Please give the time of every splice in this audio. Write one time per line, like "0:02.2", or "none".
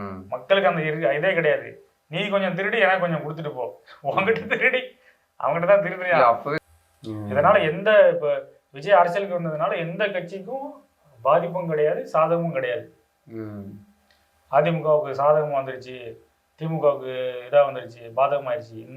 0:06.5